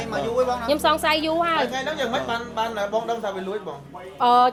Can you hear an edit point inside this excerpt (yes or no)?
no